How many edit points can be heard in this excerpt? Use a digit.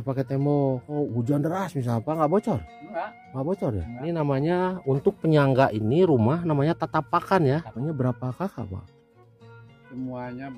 3